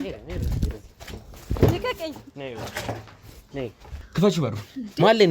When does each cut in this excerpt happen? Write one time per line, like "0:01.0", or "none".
0:04.0